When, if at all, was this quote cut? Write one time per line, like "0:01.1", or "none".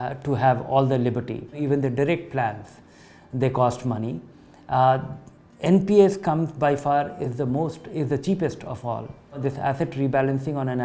0:01.6
0:09.3